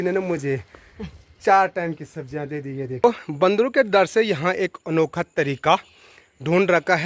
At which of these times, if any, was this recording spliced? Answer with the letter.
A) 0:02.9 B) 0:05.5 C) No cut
A